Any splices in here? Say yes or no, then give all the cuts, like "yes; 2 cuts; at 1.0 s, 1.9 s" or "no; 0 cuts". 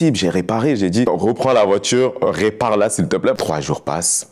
yes; 2 cuts; at 1.0 s, 3.4 s